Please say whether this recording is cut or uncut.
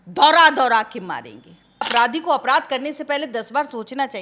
cut